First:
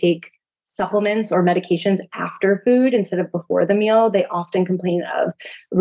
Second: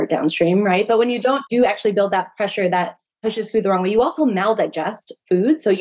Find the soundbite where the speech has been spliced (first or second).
second